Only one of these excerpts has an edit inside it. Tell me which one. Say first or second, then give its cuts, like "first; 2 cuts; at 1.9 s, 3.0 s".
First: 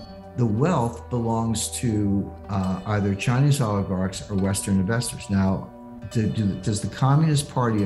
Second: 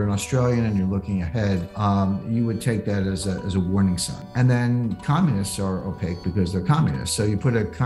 second; 2 cuts; at 1.7 s, 4.3 s